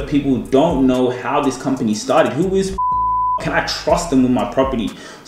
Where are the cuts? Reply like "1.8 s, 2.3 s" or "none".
none